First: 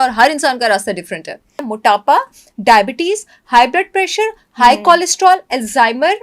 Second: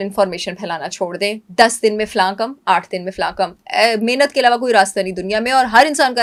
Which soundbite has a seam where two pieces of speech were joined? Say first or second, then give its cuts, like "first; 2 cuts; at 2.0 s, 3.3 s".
first; 1 cut; at 1.6 s